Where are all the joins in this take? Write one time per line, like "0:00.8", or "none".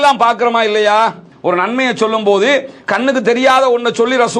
0:01.3